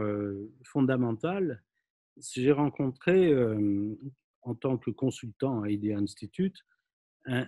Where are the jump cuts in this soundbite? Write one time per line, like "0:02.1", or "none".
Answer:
none